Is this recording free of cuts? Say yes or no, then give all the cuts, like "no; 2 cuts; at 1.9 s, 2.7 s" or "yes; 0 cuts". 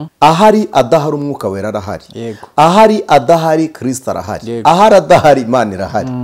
yes; 0 cuts